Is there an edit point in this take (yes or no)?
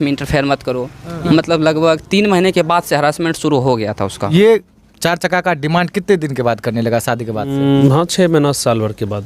yes